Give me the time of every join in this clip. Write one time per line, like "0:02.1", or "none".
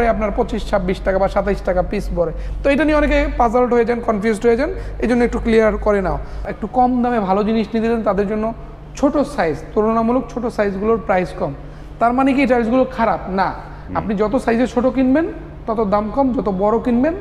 0:06.4

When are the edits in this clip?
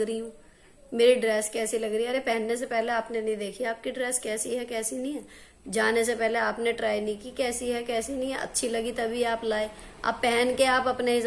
none

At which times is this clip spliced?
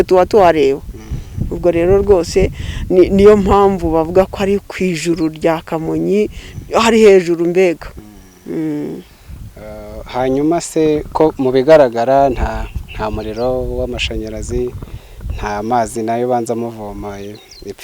none

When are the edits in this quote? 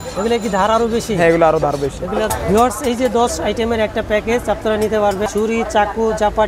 0:02.3
0:05.3

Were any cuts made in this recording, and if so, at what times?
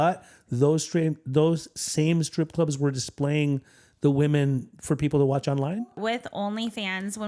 0:06.0

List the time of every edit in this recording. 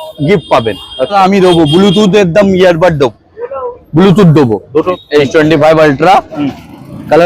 0:01.2
0:04.9

